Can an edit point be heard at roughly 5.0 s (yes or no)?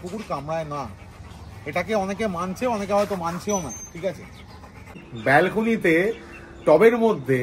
yes